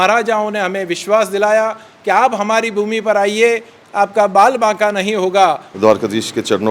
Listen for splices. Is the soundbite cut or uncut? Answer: cut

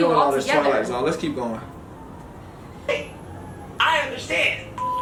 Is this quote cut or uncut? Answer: uncut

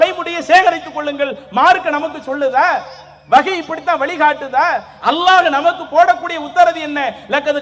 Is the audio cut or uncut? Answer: uncut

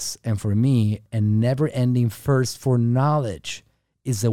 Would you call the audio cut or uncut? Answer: cut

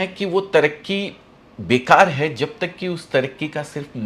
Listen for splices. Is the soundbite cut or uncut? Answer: uncut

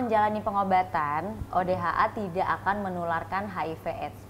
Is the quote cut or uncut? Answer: uncut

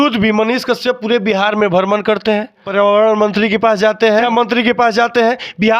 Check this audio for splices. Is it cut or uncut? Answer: cut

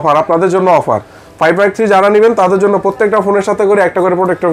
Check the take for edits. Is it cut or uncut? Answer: uncut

